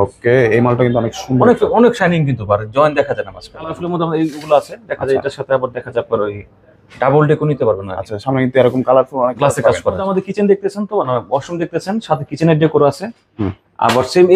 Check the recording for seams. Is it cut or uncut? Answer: cut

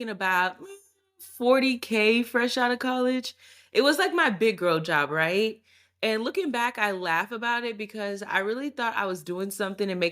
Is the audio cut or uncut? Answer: uncut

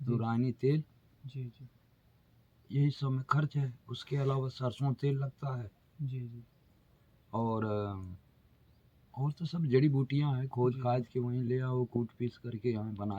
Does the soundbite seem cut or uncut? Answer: uncut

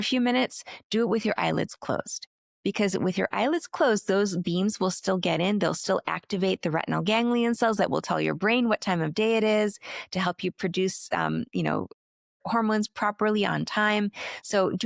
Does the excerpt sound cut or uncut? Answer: uncut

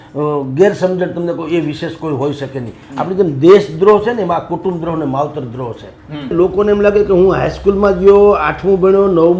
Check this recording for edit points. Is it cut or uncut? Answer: cut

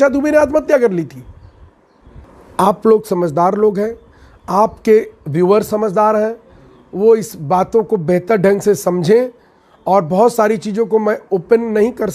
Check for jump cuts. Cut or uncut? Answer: cut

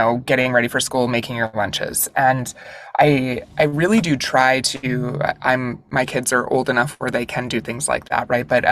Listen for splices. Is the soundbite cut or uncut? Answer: uncut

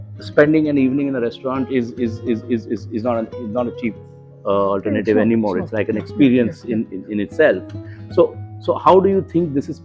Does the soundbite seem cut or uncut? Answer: uncut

